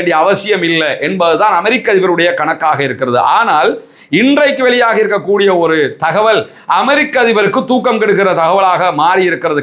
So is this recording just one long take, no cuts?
yes; 0 cuts

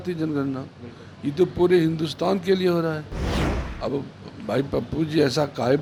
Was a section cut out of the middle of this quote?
no; 0 cuts

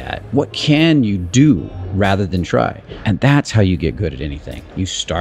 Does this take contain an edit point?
yes; 1 cut; at 2.9 s

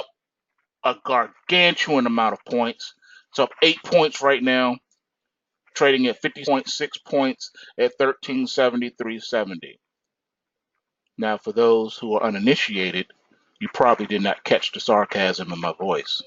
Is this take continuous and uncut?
yes; 0 cuts

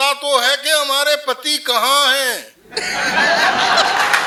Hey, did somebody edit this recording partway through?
no; 0 cuts

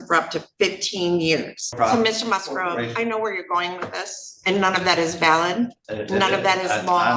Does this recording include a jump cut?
yes; 2 cuts; at 1.7 s, 5.9 s

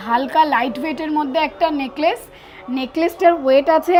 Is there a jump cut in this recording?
no; 0 cuts

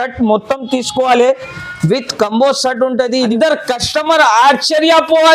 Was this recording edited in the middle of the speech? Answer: yes; 1 cut; at 3.3 s

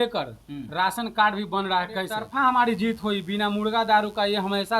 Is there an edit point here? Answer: yes; 1 cut; at 2.2 s

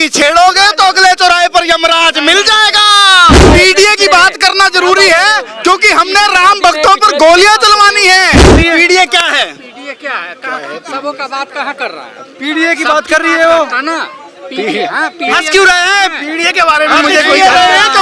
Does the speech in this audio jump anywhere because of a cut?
yes; 2 cuts; at 3.5 s, 8.6 s

